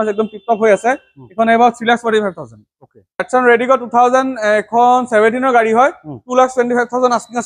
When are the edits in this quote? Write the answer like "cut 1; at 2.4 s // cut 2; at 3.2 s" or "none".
cut 1; at 3.2 s